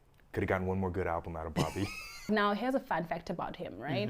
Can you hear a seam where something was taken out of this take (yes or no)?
yes